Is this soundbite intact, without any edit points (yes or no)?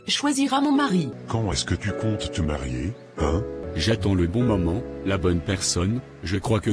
no